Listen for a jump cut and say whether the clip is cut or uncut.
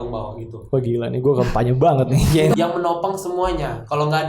cut